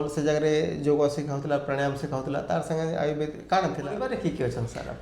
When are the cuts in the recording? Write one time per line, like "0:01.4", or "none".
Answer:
0:04.0